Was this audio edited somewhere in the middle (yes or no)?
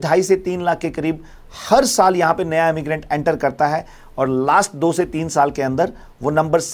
no